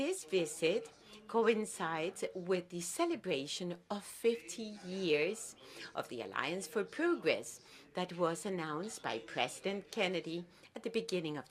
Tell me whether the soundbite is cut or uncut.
uncut